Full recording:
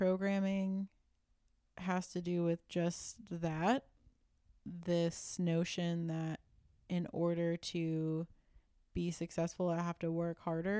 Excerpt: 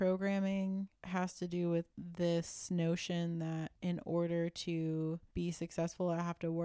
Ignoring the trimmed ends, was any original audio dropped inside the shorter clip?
yes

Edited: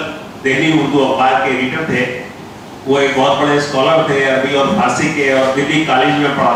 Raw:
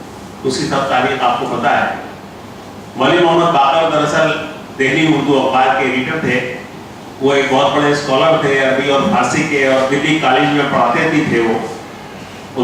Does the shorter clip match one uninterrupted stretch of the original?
yes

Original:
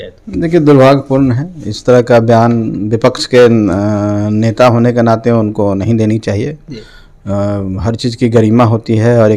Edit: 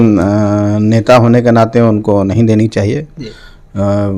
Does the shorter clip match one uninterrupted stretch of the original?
yes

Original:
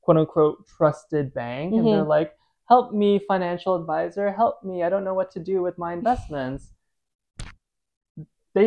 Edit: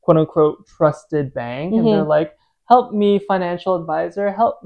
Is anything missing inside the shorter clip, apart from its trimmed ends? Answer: no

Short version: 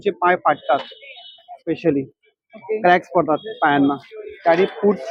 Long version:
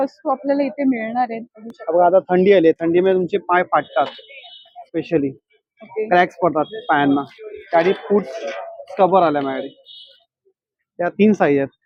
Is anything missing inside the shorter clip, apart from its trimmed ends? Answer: no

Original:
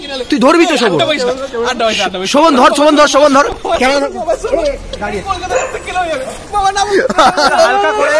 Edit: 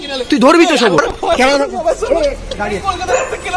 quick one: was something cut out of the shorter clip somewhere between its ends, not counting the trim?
yes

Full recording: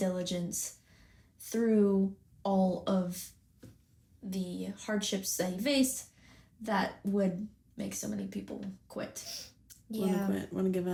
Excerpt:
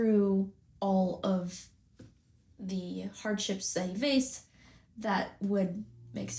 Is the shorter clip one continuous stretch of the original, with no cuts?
yes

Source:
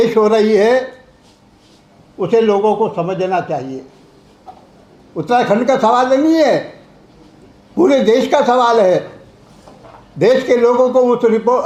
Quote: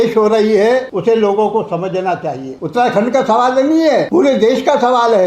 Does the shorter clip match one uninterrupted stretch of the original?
no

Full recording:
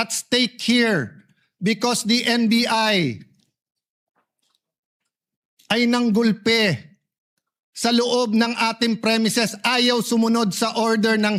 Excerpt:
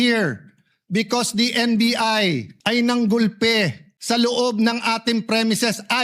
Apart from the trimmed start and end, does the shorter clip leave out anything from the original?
yes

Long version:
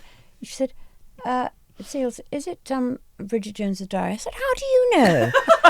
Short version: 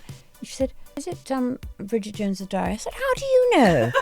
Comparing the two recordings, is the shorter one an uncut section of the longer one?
no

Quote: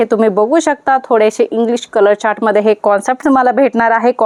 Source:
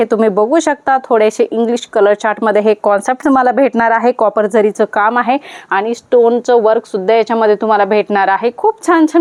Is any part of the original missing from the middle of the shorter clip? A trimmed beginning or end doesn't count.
no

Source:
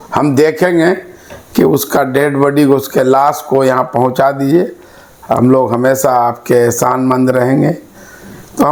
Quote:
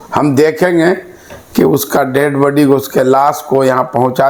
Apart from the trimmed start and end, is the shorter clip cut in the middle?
no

